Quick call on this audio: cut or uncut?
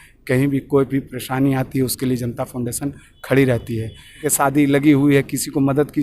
cut